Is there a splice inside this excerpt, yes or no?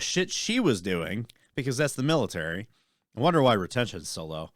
no